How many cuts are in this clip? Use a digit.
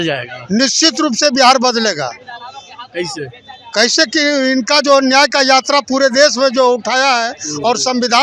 0